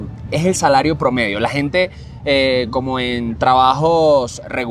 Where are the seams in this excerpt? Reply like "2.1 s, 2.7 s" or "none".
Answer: none